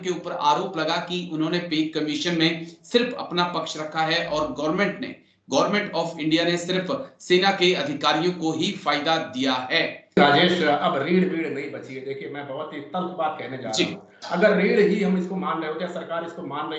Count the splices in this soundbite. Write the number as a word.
one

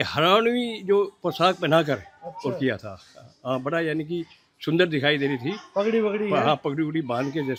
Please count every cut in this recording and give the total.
zero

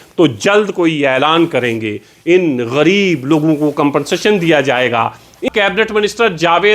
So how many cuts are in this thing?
one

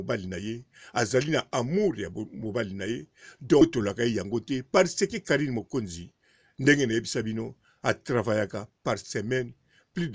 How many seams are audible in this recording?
one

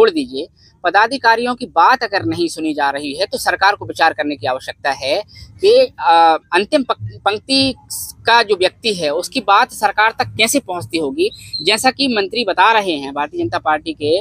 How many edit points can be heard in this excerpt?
zero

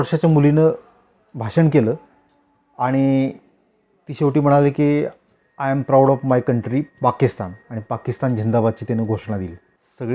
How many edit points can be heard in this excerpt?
zero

